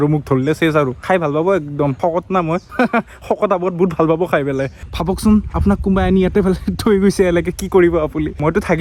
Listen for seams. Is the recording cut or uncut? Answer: uncut